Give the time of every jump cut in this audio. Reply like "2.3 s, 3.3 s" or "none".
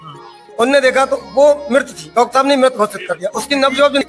none